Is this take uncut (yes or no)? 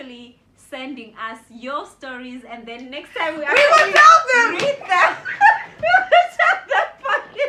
yes